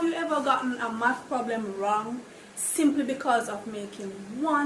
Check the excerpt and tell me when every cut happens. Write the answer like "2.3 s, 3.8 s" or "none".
3.2 s